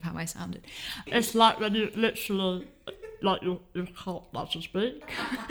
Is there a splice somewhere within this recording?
yes; 1 cut; at 1.0 s

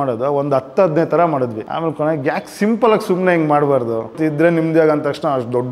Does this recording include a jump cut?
yes; 2 cuts; at 1.6 s, 4.2 s

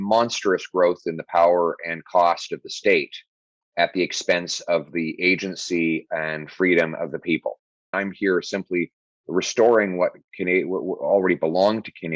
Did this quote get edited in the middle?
yes; 1 cut; at 7.9 s

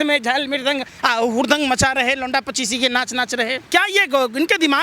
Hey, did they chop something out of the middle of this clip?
yes; 1 cut; at 3.6 s

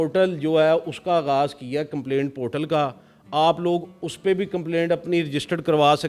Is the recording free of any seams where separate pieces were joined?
yes; 0 cuts

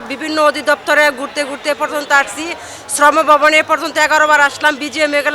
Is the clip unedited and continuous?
yes; 0 cuts

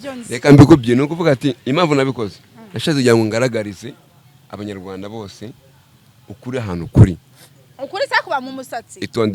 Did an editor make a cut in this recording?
no; 0 cuts

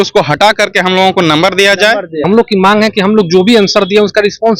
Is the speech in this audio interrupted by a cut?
yes; 1 cut; at 2.2 s

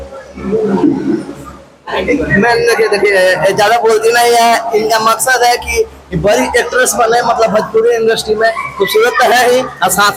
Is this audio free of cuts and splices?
yes; 0 cuts

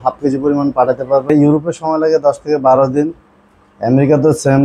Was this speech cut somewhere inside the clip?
yes; 1 cut; at 1.3 s

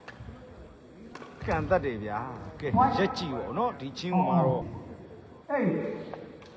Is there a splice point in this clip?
no; 0 cuts

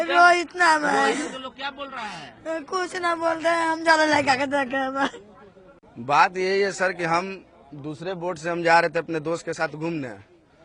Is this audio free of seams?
no; 1 cut; at 5.7 s

